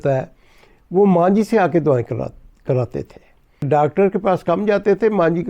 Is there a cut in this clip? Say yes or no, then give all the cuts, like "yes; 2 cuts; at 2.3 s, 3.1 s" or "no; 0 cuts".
yes; 1 cut; at 3.7 s